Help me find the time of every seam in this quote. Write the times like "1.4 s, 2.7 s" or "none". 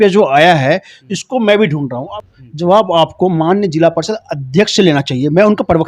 2.2 s